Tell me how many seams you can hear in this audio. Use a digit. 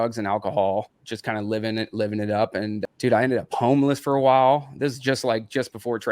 2